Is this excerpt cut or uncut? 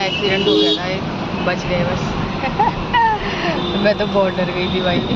uncut